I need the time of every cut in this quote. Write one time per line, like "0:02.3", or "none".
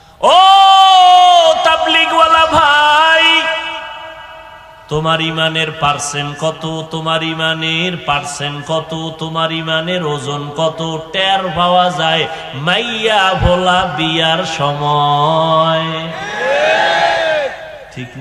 none